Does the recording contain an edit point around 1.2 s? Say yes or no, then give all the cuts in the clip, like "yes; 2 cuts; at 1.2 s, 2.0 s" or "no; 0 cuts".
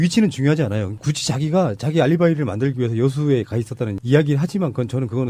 no; 0 cuts